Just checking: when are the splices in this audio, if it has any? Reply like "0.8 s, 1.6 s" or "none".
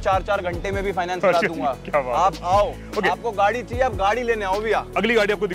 none